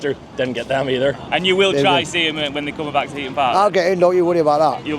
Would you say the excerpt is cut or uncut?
cut